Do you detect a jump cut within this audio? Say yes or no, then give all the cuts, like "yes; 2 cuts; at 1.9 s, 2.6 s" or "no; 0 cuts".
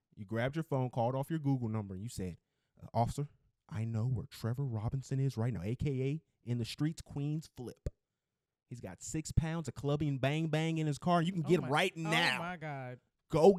no; 0 cuts